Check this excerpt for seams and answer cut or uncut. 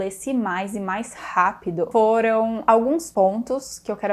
cut